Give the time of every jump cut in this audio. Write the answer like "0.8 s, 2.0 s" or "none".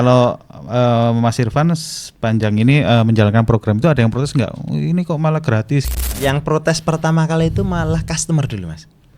6.0 s